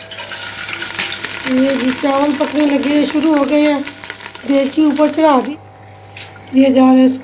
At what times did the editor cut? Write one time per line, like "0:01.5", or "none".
0:05.5